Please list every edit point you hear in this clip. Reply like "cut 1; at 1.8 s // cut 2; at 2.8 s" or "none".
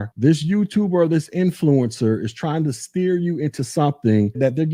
none